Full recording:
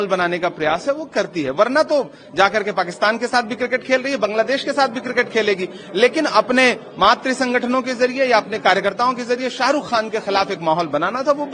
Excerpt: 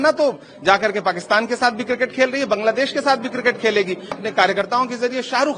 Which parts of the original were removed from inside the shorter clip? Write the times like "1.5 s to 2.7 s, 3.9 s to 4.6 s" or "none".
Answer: 5.9 s to 8.5 s

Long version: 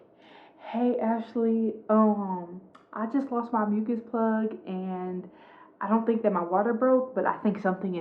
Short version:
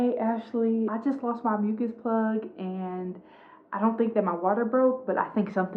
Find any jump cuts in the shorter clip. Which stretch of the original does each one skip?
1.8 s to 3.0 s

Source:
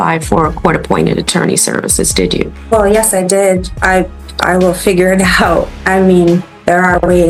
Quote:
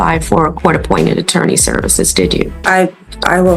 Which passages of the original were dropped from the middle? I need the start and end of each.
2.6 s to 3.7 s

